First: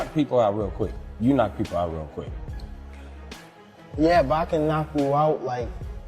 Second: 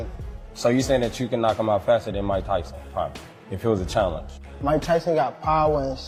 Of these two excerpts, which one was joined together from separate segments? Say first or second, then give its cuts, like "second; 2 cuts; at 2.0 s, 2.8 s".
first; 2 cuts; at 2.4 s, 4.0 s